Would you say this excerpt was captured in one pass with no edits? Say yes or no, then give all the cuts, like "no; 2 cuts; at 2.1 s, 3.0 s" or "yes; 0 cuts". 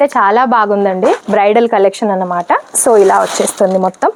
yes; 0 cuts